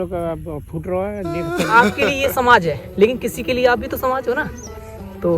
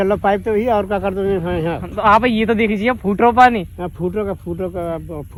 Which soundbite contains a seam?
first; 1 cut; at 1.7 s

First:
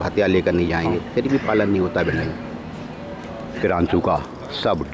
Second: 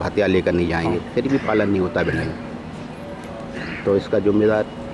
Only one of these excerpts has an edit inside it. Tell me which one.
first; 1 cut; at 3.6 s

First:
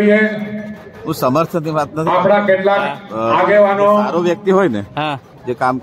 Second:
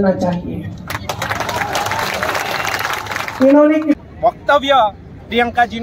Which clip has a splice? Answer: second; 1 cut; at 4.0 s

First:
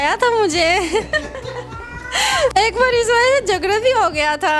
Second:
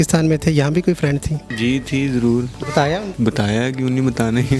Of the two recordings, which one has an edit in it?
second; 2 cuts; at 1.4 s, 3.1 s

